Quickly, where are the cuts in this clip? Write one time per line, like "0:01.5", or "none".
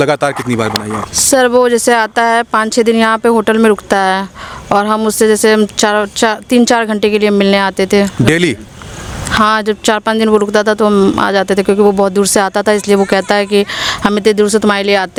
none